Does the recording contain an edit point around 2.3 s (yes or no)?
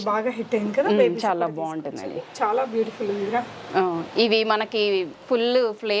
no